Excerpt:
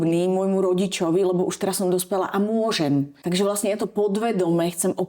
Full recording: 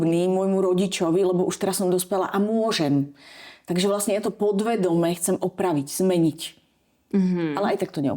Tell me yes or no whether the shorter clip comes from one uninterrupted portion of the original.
no